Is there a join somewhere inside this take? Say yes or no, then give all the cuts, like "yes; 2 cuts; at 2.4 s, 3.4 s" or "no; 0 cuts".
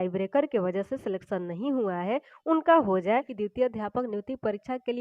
yes; 1 cut; at 3.3 s